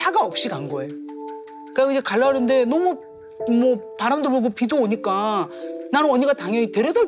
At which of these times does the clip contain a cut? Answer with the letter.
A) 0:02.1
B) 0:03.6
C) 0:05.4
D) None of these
D